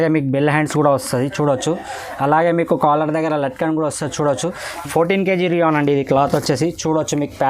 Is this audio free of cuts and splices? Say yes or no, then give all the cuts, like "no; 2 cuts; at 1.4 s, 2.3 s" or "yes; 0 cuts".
no; 1 cut; at 4.7 s